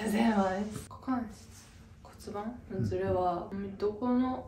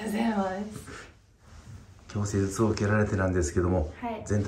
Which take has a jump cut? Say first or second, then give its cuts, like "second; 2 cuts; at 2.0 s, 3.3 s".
first; 2 cuts; at 0.9 s, 3.5 s